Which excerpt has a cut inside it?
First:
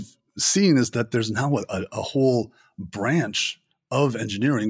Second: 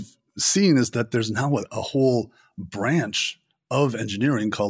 second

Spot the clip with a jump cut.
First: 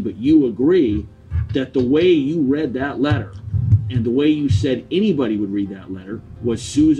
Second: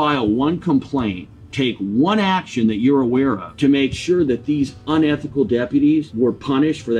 second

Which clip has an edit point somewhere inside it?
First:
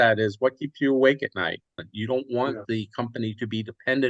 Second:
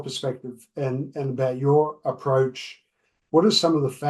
first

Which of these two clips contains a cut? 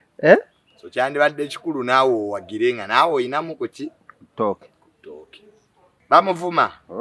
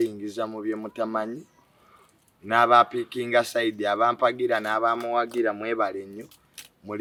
first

